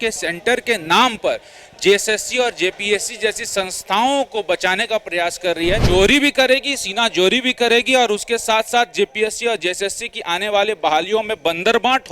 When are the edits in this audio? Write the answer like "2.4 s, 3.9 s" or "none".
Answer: 5.8 s